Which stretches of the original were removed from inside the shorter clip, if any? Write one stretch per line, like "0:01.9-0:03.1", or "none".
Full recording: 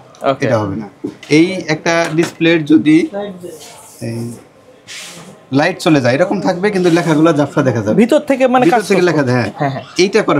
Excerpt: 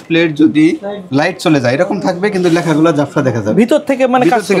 0:03.3-0:05.4